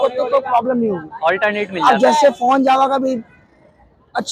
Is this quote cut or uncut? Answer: uncut